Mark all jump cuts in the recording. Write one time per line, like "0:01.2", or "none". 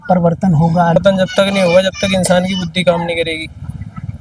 0:01.0